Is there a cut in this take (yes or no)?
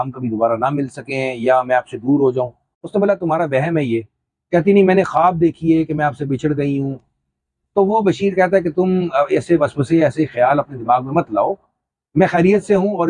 no